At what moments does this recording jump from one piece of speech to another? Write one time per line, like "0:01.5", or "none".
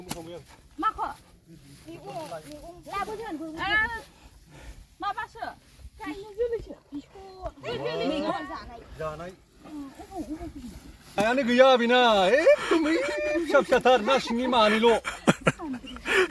0:11.2